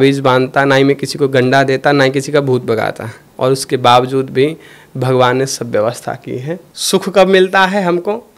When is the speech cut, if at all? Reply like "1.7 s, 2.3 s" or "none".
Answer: 3.2 s, 6.7 s